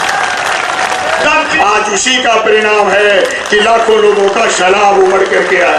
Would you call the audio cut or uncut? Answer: cut